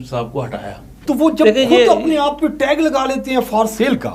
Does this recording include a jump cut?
yes; 1 cut; at 0.9 s

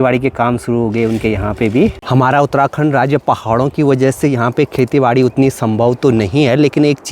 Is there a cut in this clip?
yes; 1 cut; at 2.0 s

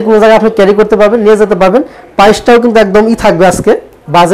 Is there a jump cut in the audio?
no; 0 cuts

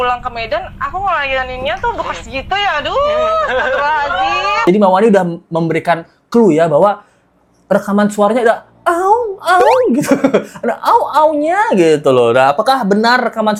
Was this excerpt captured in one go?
yes; 0 cuts

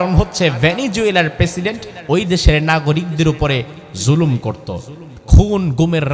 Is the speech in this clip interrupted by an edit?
no; 0 cuts

